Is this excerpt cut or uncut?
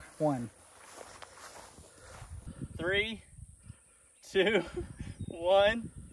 cut